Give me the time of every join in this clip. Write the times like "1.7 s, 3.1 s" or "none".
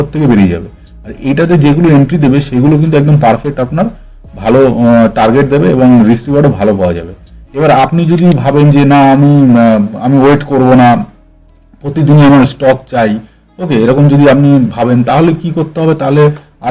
none